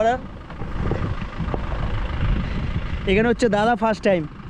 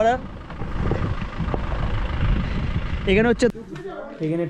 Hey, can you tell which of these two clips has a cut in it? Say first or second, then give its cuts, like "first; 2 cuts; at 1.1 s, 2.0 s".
second; 1 cut; at 3.5 s